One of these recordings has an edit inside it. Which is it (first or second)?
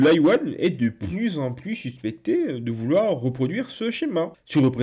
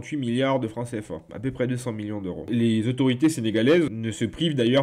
second